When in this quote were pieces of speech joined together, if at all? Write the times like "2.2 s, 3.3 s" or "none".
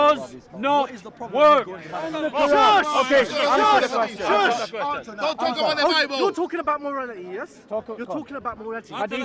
2.2 s

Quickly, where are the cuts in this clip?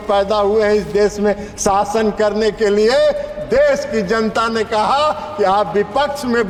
none

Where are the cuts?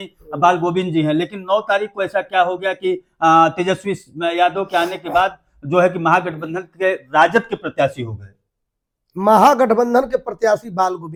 none

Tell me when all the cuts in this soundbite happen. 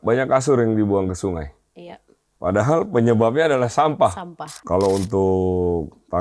4.6 s

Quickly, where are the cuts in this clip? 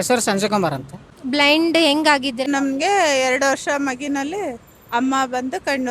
1.1 s, 2.5 s

